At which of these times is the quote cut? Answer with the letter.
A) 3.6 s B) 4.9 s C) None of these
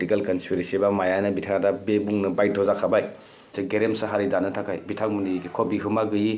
A